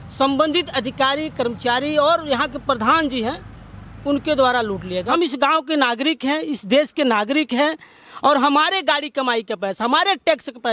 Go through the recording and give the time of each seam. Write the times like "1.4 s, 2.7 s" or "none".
5.1 s